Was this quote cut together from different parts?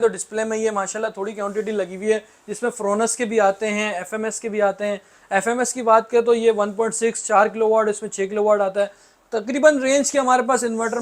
no; 0 cuts

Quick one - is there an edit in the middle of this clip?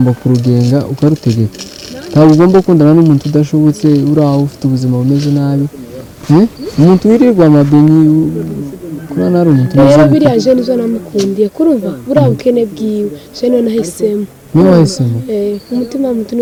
no; 0 cuts

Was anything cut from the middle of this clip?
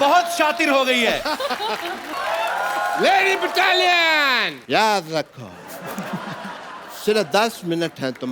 yes; 1 cut; at 2.1 s

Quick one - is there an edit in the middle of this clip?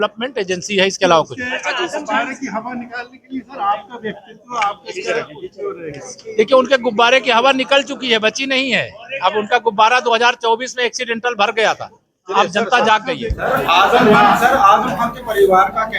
yes; 1 cut; at 13.5 s

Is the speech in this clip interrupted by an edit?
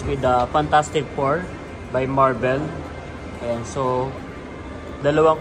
no; 0 cuts

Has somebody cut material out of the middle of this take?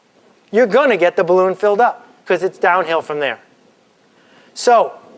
no; 0 cuts

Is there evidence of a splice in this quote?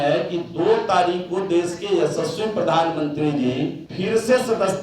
yes; 1 cut; at 3.8 s

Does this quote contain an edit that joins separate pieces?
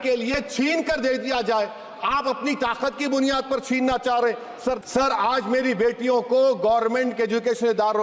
yes; 1 cut; at 4.8 s

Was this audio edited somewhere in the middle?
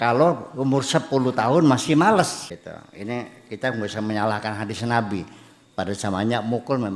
yes; 1 cut; at 2.5 s

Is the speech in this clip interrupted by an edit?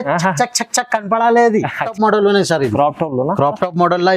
yes; 1 cut; at 1.8 s

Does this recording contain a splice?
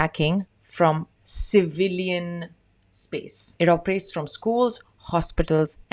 no; 0 cuts

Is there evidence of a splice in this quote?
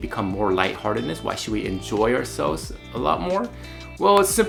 no; 0 cuts

